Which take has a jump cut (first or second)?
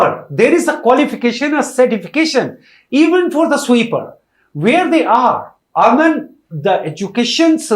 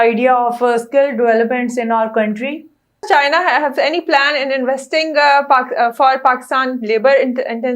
second